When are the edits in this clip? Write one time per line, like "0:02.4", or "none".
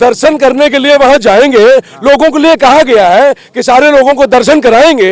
none